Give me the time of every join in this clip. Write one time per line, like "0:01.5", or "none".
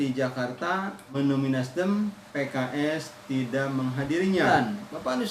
0:01.2
0:02.3
0:04.5